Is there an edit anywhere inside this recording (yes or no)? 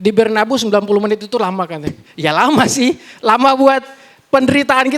yes